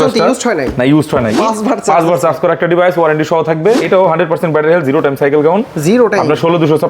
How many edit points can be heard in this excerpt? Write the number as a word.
two